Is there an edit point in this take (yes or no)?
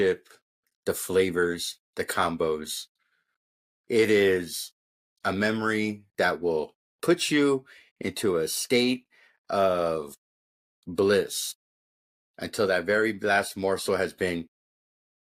no